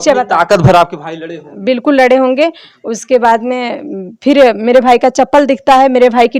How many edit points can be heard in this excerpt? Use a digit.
0